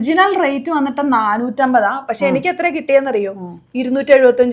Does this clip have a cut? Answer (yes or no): no